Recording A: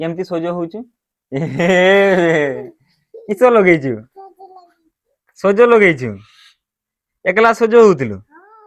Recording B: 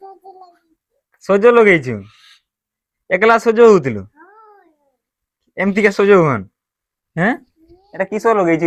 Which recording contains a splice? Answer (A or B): A